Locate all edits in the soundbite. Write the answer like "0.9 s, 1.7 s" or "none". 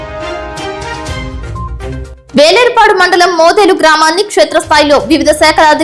none